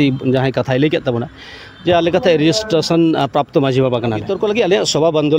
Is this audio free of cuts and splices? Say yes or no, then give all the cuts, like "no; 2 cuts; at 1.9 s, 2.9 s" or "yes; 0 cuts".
no; 1 cut; at 4.3 s